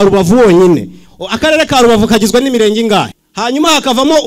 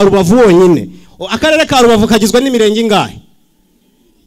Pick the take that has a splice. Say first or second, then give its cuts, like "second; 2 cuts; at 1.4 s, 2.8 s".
first; 1 cut; at 3.2 s